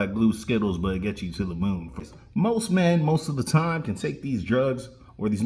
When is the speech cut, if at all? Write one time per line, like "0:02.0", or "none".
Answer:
0:02.0